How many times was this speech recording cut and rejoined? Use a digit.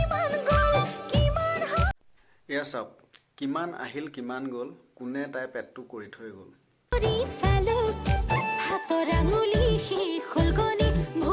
3